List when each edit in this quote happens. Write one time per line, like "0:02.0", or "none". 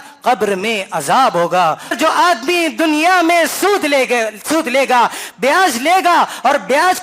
0:01.9